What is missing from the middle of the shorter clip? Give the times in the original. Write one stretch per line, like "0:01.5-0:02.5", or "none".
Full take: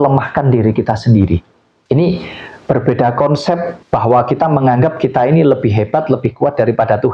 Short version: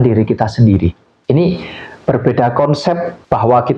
0:01.6-0:01.7